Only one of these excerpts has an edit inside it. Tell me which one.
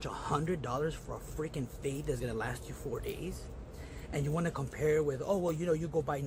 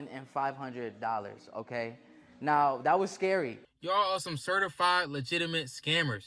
second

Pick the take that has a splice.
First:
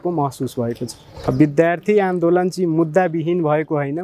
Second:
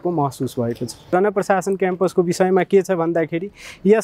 second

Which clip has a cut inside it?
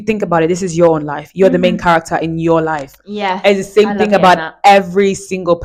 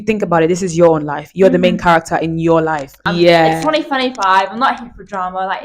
second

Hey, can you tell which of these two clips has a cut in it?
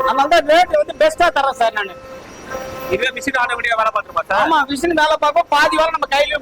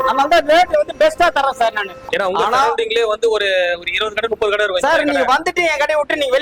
second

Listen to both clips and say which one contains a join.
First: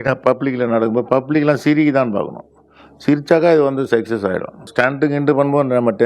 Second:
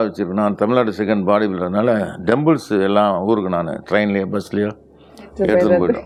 first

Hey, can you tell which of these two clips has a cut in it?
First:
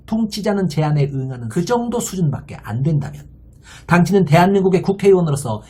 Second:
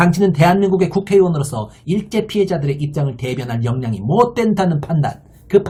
first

